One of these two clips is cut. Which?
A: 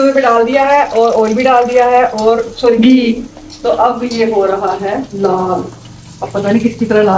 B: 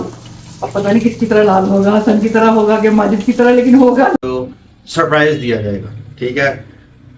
B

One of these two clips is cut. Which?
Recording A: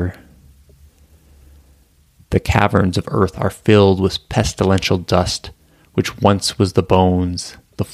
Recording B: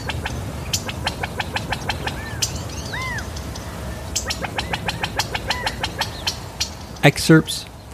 B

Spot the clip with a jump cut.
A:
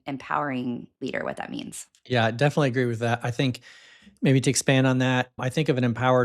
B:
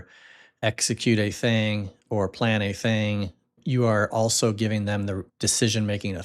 B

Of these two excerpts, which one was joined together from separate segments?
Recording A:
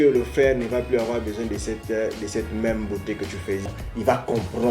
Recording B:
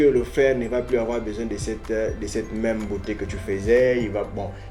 A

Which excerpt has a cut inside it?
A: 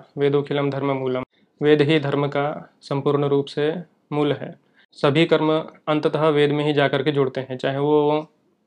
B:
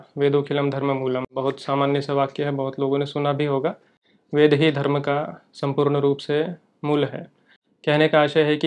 A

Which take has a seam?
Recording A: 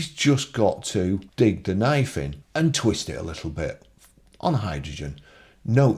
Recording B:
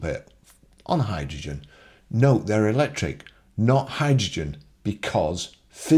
A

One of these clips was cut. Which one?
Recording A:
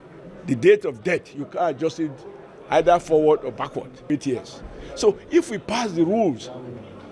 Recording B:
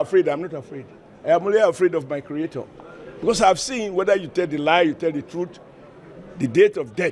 A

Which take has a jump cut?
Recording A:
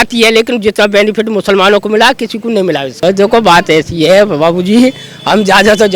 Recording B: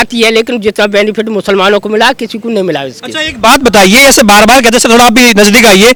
A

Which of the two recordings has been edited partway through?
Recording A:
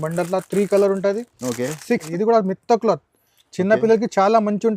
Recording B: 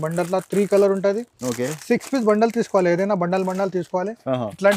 A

